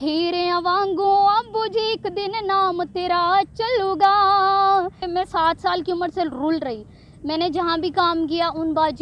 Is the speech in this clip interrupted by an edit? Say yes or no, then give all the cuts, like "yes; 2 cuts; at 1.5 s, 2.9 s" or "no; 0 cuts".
yes; 1 cut; at 5.0 s